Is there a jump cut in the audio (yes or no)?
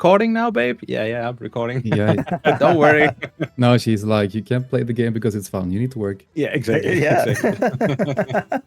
no